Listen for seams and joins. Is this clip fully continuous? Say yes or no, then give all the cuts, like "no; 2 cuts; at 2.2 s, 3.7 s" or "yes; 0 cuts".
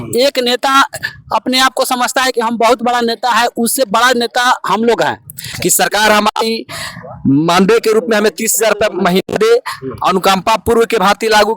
no; 1 cut; at 5.5 s